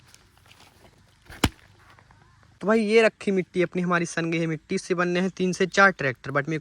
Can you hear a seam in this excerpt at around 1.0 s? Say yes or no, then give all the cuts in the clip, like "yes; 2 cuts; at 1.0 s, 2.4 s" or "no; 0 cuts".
no; 0 cuts